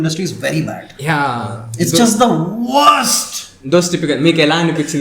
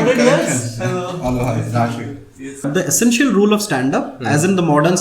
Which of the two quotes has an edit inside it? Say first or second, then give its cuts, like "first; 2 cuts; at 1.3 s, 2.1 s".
second; 1 cut; at 2.7 s